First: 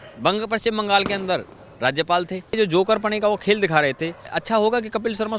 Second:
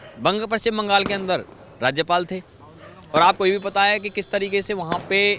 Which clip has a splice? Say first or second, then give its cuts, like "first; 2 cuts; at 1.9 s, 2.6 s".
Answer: first; 2 cuts; at 2.6 s, 4.4 s